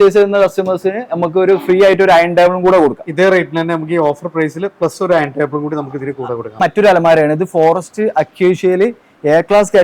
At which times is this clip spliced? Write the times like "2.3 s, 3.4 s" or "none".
6.6 s